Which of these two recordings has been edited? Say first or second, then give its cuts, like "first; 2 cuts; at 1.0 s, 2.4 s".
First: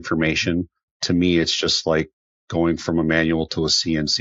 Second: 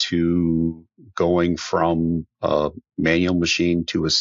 first; 1 cut; at 0.9 s